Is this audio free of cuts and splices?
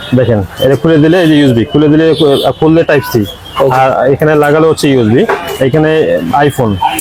yes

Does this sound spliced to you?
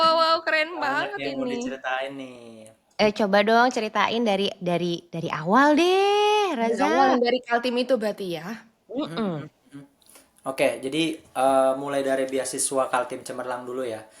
no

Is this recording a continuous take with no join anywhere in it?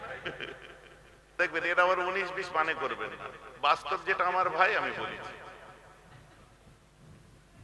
no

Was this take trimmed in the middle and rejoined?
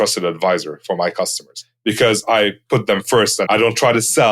yes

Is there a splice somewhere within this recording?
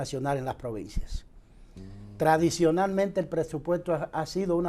no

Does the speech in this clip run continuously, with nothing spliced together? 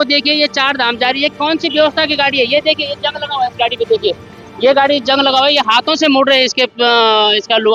yes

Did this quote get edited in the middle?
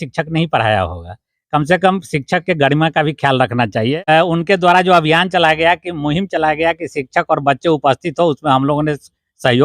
yes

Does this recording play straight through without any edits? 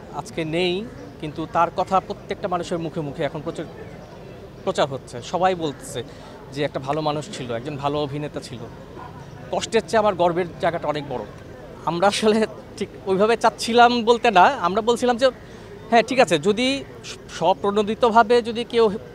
yes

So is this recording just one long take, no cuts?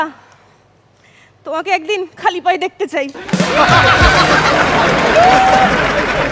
yes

